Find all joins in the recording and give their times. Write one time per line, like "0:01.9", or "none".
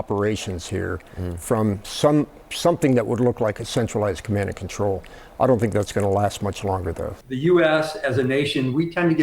0:07.2